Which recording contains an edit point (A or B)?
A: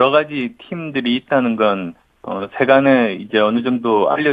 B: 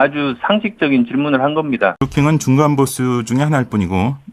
B